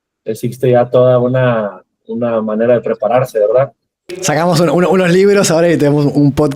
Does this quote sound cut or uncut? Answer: cut